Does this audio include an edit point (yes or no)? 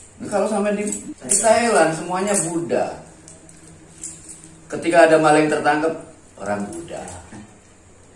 yes